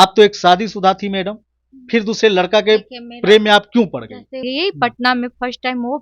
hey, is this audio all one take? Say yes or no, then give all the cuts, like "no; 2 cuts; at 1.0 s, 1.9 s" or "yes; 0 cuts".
no; 1 cut; at 4.4 s